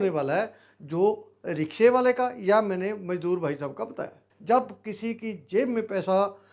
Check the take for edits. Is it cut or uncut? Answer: cut